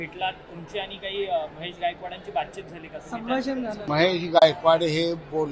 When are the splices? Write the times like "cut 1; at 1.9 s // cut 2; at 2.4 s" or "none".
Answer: cut 1; at 3.8 s